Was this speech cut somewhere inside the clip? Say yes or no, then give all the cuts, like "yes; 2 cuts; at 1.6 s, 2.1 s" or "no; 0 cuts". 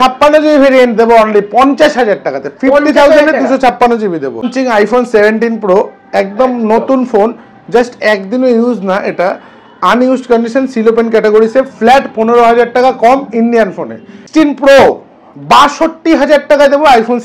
yes; 2 cuts; at 4.5 s, 14.2 s